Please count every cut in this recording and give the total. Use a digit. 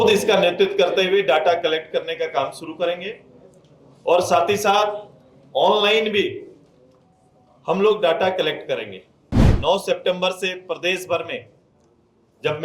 1